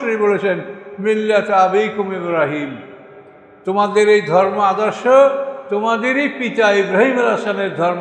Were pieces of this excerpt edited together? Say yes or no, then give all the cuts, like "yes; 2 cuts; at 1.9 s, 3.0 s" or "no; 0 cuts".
no; 0 cuts